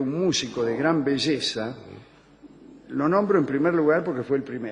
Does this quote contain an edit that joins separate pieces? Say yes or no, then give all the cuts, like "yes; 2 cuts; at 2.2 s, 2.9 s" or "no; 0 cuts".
yes; 1 cut; at 2.7 s